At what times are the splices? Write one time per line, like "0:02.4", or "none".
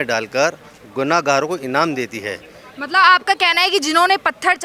none